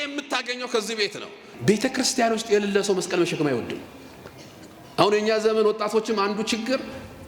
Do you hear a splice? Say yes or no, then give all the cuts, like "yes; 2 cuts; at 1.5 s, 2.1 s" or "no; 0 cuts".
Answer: yes; 1 cut; at 1.5 s